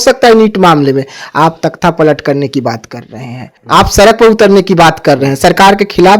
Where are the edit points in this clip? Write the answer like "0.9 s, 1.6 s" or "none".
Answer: 3.5 s